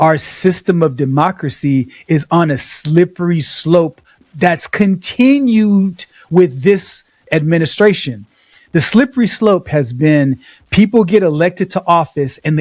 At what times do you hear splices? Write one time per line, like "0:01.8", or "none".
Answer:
none